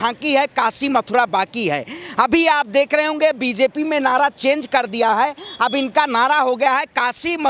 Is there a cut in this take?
no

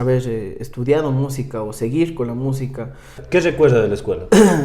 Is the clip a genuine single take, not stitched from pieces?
no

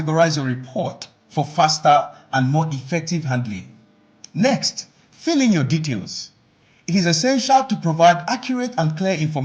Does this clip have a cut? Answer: no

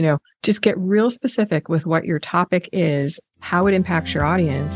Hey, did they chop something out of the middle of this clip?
no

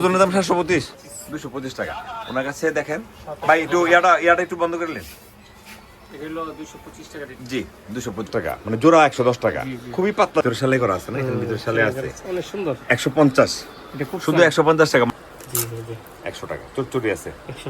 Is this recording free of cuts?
no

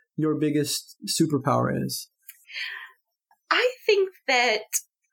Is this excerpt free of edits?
yes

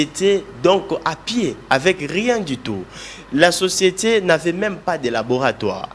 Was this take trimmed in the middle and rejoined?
no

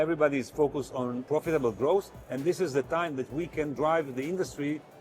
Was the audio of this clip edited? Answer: yes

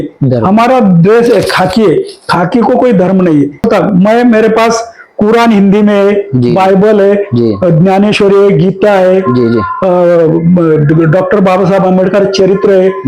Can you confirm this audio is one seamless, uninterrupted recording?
no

